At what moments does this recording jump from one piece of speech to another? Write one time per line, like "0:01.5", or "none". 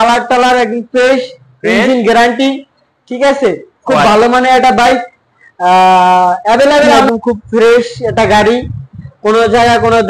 0:07.0